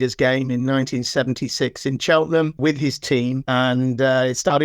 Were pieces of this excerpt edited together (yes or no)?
yes